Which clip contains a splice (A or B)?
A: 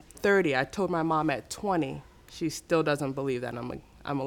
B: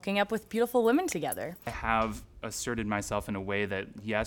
B